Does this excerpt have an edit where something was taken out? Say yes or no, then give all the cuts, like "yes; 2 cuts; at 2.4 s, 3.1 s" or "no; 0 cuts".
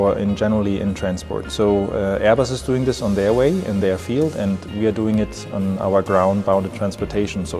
no; 0 cuts